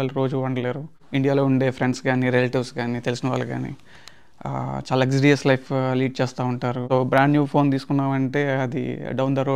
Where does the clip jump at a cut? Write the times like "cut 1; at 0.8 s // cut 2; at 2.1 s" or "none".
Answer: cut 1; at 1.0 s // cut 2; at 6.8 s